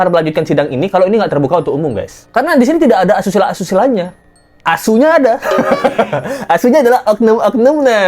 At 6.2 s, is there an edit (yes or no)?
no